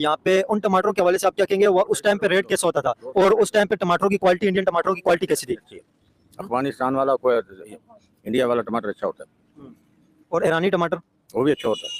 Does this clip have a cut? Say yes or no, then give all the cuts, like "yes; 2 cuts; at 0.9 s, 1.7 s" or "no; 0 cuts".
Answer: no; 0 cuts